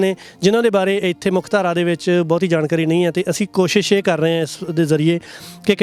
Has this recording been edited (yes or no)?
no